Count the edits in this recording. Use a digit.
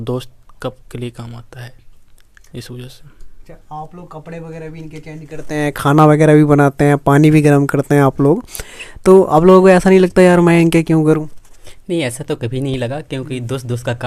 0